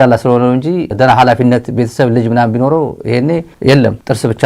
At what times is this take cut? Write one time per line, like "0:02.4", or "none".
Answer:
none